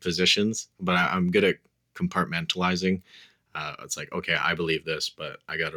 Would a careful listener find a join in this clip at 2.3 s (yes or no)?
no